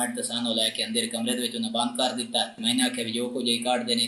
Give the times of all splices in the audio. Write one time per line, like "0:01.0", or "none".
0:02.6